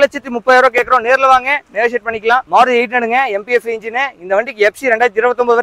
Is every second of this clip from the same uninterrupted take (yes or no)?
no